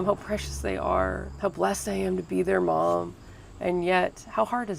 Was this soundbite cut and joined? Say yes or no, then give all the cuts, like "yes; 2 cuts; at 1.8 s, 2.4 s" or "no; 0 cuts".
yes; 1 cut; at 1.3 s